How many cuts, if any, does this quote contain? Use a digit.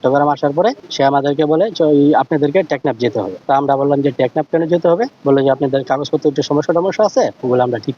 3